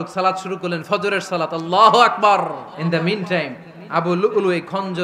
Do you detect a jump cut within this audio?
yes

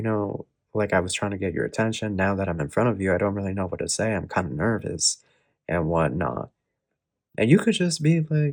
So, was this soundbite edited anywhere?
no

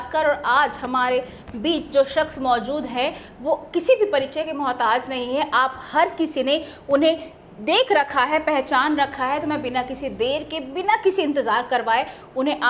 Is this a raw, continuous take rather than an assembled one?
yes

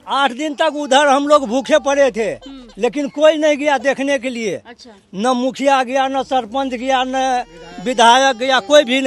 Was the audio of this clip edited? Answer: no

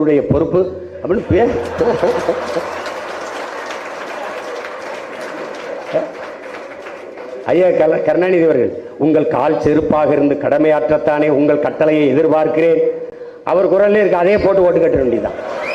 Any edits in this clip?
no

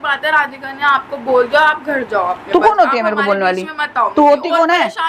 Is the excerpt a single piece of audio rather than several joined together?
yes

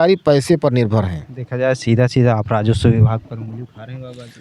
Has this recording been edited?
no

